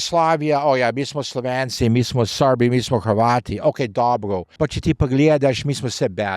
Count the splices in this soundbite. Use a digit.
1